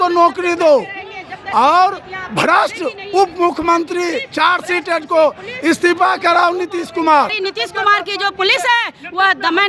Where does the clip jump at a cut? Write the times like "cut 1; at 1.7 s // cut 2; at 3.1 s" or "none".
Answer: cut 1; at 7.3 s

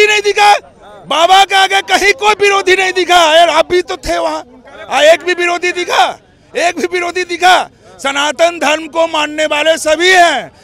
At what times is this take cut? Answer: none

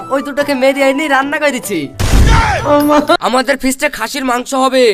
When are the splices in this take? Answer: cut 1; at 3.2 s

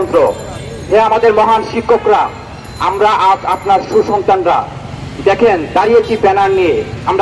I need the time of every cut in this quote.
none

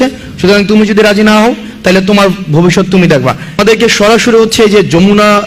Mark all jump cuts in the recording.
cut 1; at 3.6 s

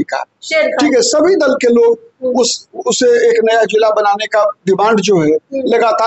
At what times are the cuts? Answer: none

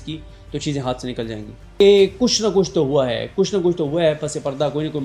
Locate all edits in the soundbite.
cut 1; at 1.8 s

